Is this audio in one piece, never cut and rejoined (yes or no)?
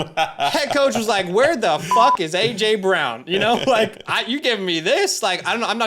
yes